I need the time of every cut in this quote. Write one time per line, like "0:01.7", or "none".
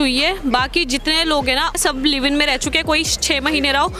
none